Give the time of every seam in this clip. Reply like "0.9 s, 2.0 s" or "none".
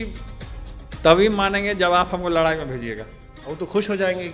none

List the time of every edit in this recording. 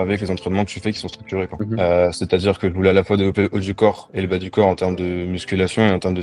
1.5 s

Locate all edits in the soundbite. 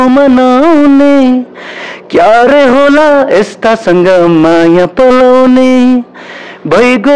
none

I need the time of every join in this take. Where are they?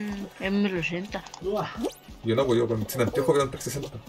none

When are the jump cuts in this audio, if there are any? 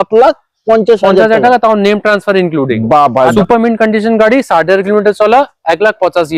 3.3 s

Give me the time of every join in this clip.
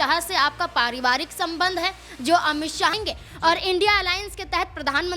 3.0 s

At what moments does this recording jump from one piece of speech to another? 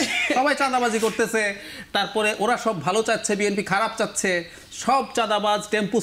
none

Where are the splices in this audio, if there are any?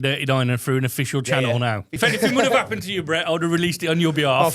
1.9 s

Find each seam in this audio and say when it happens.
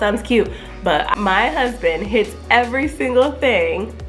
1.1 s

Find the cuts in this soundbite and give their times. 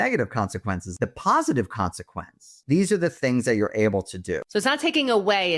0.9 s, 2.5 s, 4.8 s

